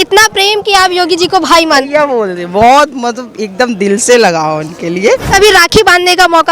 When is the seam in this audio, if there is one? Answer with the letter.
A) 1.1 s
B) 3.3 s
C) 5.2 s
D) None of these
C